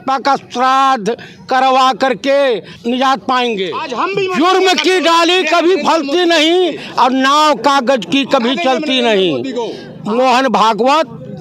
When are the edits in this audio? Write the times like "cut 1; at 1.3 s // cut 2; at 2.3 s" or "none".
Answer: cut 1; at 2.7 s // cut 2; at 3.8 s // cut 3; at 9.9 s